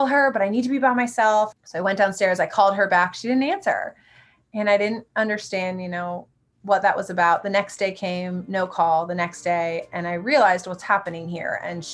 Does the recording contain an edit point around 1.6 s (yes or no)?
yes